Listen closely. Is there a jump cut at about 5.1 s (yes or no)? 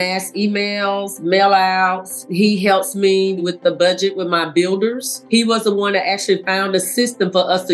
yes